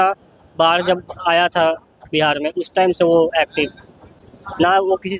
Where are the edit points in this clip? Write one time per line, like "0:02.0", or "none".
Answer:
none